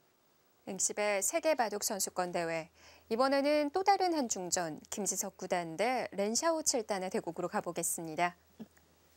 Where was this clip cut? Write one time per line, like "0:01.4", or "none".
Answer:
none